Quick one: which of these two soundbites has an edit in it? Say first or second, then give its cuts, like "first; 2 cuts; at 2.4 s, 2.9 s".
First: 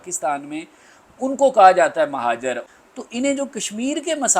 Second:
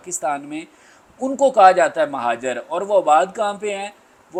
first; 1 cut; at 2.6 s